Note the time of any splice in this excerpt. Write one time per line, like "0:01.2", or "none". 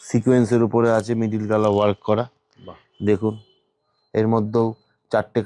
none